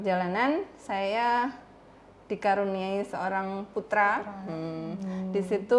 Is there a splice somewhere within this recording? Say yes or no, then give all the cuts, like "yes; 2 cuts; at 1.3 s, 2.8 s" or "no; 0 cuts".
no; 0 cuts